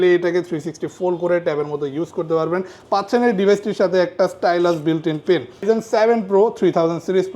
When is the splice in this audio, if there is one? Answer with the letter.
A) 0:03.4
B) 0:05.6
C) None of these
B